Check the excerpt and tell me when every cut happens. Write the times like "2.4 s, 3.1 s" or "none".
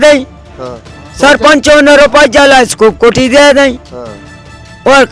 none